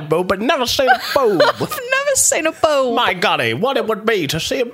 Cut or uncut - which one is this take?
uncut